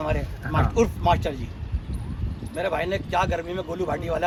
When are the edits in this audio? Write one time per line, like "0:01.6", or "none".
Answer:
none

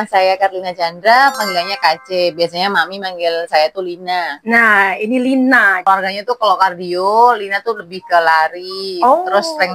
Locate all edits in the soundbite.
0:05.8

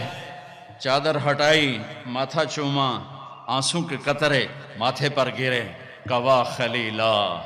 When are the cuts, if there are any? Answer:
none

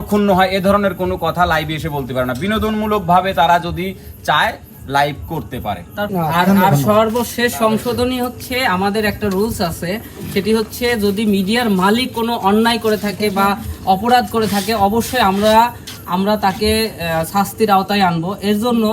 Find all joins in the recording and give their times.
0:06.0

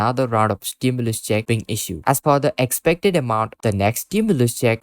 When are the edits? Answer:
0:01.9
0:03.5

